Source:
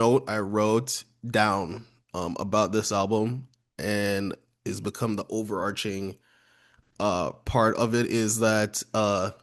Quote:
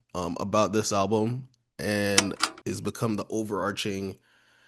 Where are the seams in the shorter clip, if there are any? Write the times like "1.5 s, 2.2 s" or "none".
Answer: none